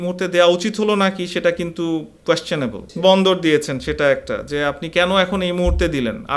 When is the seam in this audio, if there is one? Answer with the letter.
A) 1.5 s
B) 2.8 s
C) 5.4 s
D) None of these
B